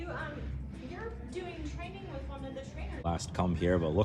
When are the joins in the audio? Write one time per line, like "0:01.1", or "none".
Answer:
0:03.0